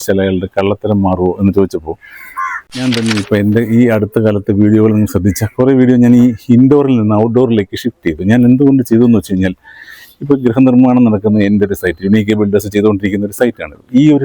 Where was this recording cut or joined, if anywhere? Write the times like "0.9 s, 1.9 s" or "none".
2.7 s